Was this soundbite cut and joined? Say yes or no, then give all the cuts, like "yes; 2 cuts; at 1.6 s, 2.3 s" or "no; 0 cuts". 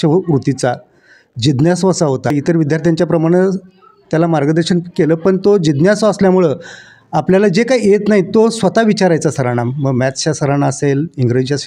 no; 0 cuts